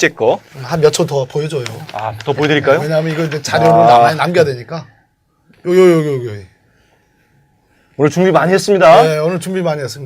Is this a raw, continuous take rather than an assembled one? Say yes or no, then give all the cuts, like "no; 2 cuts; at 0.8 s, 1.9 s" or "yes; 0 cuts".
no; 1 cut; at 6.5 s